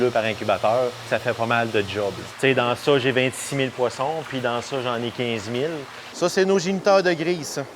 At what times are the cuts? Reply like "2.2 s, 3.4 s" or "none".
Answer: 1.1 s, 2.2 s, 6.0 s